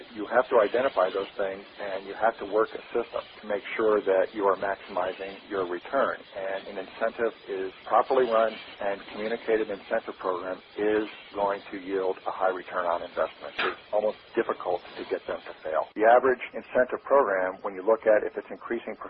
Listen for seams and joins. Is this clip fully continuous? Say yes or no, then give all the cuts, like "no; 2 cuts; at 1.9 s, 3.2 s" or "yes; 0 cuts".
no; 1 cut; at 15.9 s